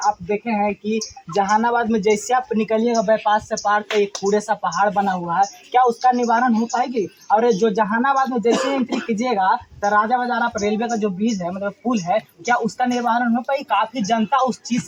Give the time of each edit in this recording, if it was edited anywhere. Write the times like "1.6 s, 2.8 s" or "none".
none